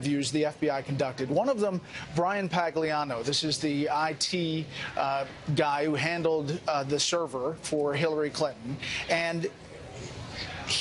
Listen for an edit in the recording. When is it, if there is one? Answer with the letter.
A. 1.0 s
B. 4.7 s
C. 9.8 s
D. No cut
A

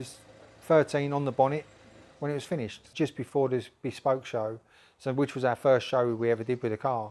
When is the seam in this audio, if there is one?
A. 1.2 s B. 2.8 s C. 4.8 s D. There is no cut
B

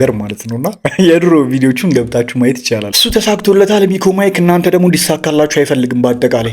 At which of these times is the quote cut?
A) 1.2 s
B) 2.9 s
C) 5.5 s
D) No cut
B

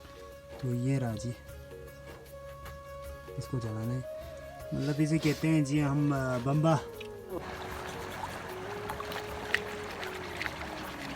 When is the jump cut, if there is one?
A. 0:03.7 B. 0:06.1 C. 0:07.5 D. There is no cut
C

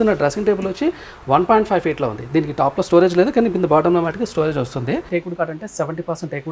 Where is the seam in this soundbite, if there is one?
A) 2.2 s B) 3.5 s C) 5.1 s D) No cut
C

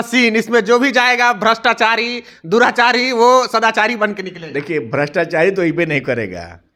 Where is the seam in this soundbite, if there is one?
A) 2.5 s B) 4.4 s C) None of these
C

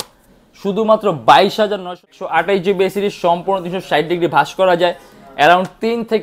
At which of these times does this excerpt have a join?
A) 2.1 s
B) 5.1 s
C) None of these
A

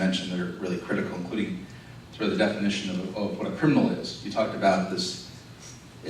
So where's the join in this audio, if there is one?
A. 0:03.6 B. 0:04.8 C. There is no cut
C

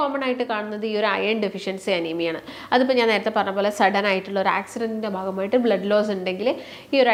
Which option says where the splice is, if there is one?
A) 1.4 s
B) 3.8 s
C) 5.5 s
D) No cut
D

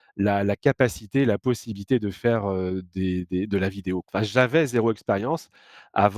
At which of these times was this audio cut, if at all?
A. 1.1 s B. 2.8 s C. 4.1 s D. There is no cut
C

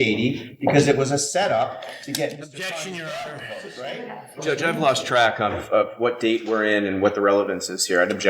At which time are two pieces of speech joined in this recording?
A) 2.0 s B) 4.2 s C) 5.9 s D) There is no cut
B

